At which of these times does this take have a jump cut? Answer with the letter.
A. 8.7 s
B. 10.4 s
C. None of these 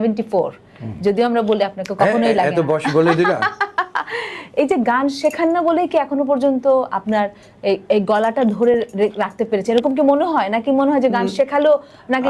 C